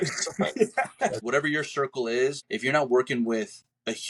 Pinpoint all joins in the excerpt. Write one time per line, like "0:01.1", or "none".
0:01.2
0:02.5